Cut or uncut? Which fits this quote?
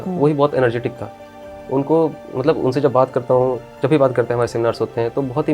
uncut